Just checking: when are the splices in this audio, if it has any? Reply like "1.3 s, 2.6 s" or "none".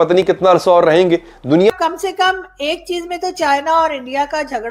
1.7 s